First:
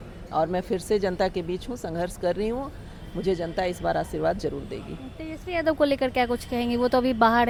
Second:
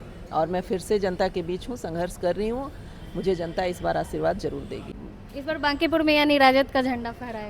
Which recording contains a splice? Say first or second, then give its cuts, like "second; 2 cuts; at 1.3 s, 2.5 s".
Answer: second; 1 cut; at 5.0 s